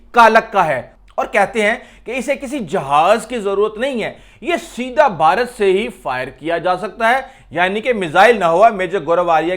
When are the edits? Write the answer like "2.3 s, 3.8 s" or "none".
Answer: 0.9 s